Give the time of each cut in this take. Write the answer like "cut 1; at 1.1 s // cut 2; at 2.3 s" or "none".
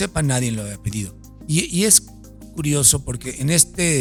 none